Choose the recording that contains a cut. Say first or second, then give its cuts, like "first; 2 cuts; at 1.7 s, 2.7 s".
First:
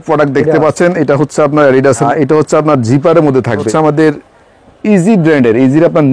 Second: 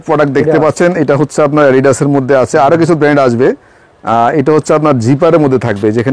first; 2 cuts; at 2.0 s, 3.7 s